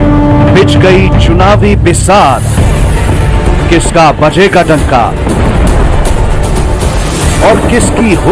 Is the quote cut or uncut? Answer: uncut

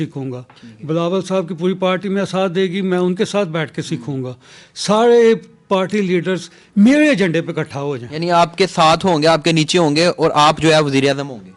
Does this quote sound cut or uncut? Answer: uncut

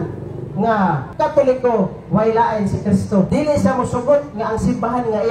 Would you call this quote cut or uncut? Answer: cut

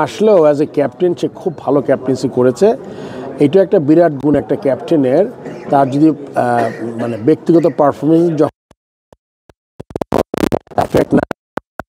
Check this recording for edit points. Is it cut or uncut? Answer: uncut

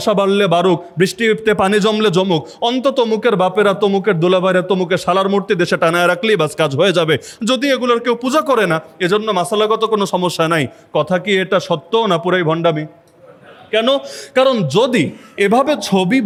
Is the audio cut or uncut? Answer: uncut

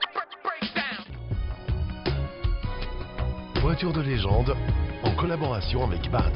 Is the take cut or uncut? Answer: cut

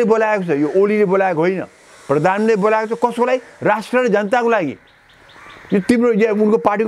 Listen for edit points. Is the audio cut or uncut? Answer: uncut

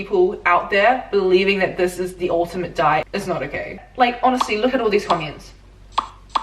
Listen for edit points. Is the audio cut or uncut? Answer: cut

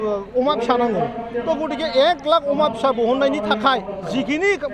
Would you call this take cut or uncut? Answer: uncut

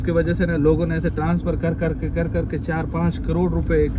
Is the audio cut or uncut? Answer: uncut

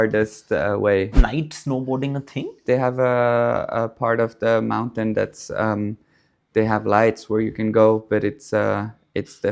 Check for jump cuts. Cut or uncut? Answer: cut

